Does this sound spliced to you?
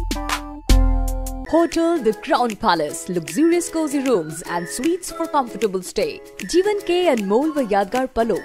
yes; 1 cut; at 1.3 s

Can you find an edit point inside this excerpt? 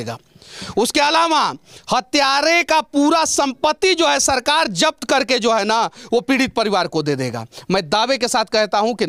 no; 0 cuts

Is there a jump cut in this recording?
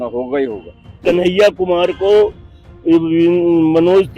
yes; 1 cut; at 1.0 s

